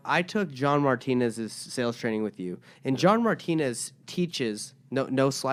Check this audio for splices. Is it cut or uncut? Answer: uncut